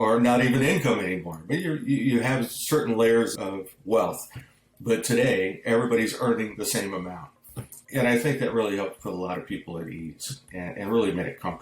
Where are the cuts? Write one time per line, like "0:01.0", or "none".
0:07.8